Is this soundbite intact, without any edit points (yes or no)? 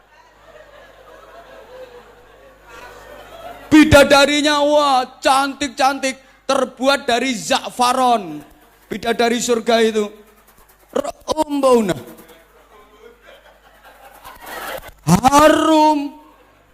yes